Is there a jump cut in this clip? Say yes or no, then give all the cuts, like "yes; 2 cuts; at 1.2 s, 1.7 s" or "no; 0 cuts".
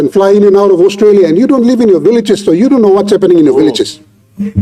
no; 0 cuts